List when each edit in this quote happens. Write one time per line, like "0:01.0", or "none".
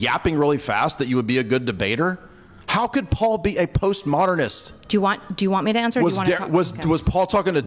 none